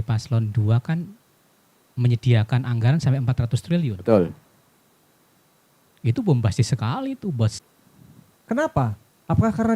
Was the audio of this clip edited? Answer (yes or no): yes